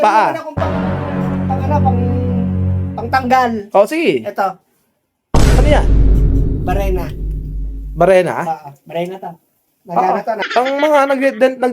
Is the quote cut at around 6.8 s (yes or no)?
no